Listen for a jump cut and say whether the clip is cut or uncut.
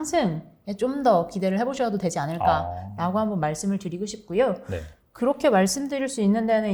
uncut